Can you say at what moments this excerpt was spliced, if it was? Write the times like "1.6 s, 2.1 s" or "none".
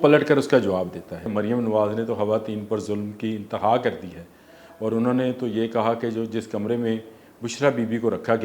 1.2 s